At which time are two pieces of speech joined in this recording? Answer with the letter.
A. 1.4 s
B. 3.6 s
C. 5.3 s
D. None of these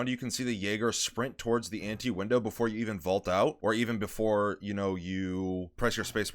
B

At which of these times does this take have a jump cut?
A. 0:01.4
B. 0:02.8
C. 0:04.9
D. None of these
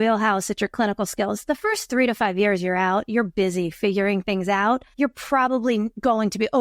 C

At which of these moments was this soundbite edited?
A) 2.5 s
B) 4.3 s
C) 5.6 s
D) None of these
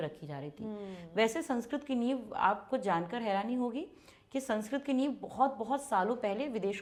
D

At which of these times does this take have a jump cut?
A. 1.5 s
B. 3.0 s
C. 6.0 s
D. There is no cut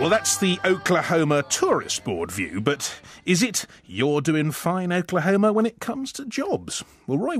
A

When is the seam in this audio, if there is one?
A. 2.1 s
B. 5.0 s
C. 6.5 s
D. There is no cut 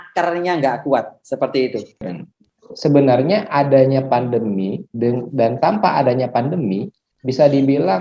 A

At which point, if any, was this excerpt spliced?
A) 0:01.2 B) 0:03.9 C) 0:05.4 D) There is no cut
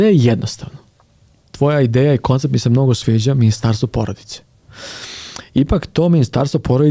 D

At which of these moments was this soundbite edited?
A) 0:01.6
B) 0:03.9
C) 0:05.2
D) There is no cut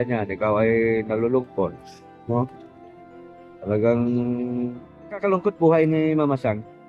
C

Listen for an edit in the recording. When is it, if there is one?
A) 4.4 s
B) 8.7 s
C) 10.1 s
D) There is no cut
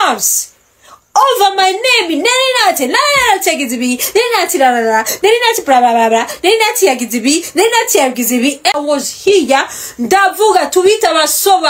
B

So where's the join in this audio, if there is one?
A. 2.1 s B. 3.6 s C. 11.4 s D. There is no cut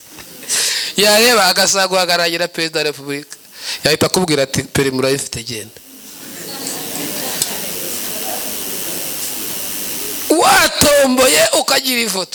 D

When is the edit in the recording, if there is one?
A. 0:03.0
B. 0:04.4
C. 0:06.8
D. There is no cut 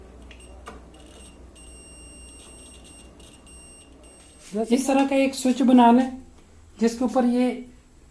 B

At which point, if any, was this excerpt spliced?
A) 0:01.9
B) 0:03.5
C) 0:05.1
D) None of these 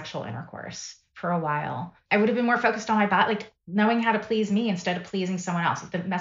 A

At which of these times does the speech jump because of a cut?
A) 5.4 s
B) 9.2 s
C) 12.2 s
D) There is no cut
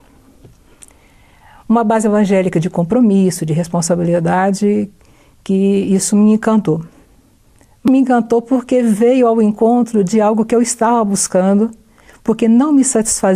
D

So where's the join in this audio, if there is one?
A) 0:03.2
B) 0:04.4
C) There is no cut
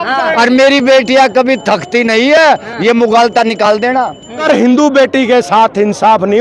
B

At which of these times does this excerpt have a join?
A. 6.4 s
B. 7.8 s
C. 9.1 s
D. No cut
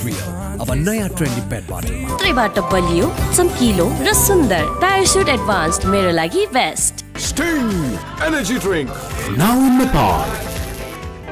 D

